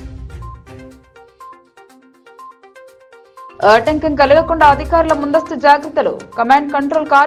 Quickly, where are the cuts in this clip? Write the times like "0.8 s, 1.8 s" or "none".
none

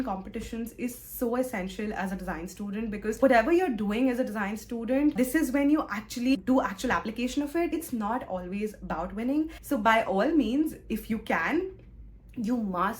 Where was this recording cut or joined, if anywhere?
3.2 s, 6.3 s, 7.8 s, 9.6 s

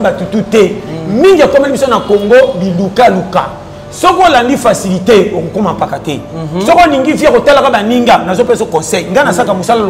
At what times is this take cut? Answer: none

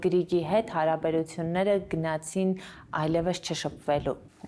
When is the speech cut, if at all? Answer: none

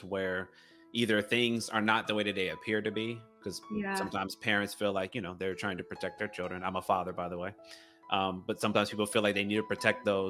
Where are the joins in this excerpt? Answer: none

